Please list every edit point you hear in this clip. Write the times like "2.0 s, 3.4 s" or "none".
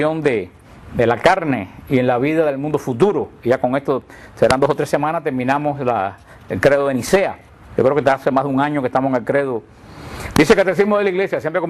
none